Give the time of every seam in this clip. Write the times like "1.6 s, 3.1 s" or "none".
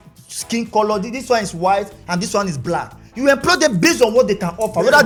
none